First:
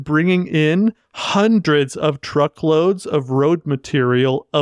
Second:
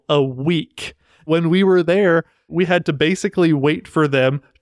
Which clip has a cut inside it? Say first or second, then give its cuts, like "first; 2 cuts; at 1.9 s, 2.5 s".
second; 2 cuts; at 1.3 s, 2.5 s